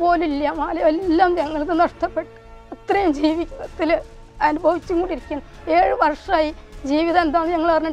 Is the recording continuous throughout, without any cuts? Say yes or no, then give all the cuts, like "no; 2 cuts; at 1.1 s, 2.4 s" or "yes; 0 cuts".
yes; 0 cuts